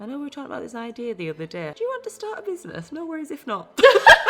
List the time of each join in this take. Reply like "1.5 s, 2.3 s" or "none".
1.7 s